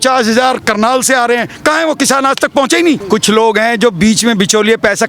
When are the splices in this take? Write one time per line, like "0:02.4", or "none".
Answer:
0:03.1